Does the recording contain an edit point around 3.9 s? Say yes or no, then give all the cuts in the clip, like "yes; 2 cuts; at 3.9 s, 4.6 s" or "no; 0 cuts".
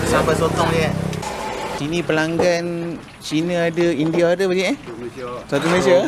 no; 1 cut; at 1.2 s